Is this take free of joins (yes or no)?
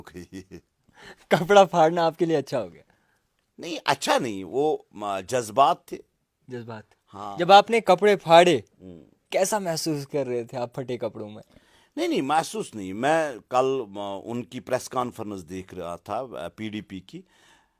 yes